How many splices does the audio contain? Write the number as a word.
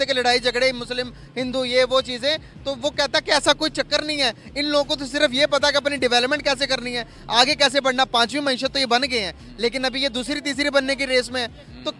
zero